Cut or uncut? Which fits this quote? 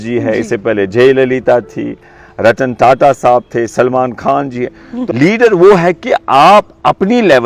cut